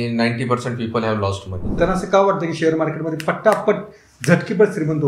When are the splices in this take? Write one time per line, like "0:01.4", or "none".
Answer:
0:01.8